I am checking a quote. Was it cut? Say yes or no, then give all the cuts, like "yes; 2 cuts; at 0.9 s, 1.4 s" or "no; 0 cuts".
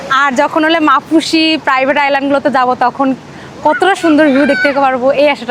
no; 0 cuts